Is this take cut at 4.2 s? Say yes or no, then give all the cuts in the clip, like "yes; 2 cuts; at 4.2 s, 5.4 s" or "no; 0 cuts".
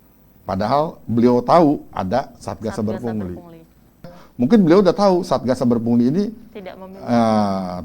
yes; 1 cut; at 4.2 s